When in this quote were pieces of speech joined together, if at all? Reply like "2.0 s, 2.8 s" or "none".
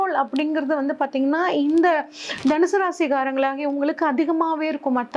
none